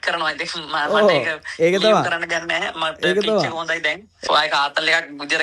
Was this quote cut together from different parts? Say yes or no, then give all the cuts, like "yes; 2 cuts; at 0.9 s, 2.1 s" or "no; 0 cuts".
yes; 1 cut; at 4.2 s